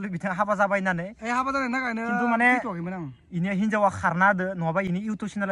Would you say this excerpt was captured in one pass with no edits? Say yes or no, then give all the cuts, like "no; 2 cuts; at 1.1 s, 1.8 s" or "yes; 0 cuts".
yes; 0 cuts